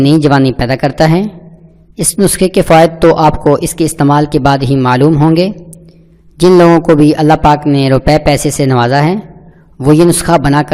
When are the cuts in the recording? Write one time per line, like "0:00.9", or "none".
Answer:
none